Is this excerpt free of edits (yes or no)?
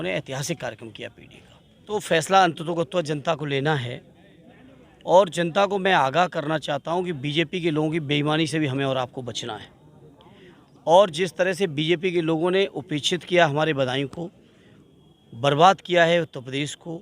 no